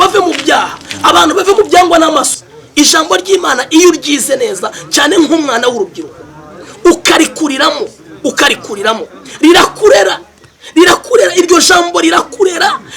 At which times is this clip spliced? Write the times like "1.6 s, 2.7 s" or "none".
2.3 s